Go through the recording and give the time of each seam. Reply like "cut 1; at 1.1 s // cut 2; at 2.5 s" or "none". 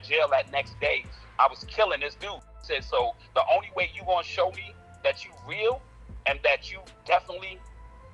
cut 1; at 2.2 s